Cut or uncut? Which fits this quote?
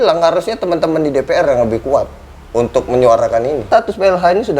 cut